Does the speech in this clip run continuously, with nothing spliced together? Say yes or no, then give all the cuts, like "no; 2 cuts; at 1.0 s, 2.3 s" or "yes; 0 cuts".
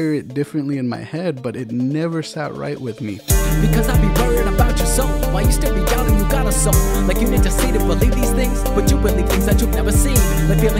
no; 1 cut; at 3.2 s